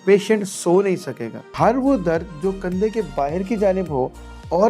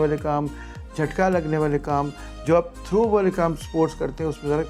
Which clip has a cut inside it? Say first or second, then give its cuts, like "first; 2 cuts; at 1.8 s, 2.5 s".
first; 1 cut; at 1.4 s